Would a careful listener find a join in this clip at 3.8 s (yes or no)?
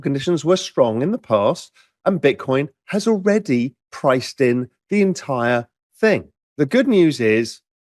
no